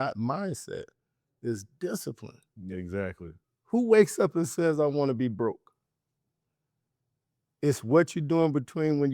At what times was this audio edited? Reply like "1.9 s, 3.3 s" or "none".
none